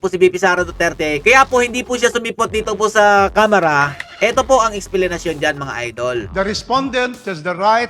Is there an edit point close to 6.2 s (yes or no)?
yes